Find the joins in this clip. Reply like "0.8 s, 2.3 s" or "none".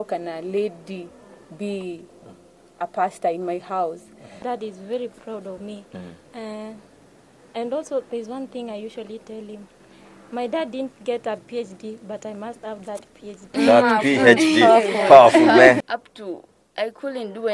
4.4 s, 15.9 s